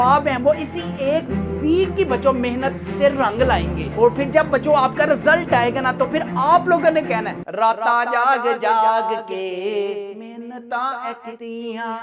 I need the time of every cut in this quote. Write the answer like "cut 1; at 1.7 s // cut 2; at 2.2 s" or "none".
none